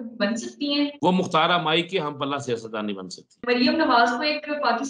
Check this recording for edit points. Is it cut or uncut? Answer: cut